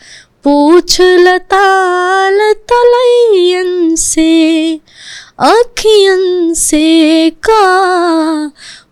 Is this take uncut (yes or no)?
yes